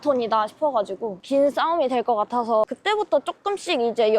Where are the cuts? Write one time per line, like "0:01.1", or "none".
0:02.6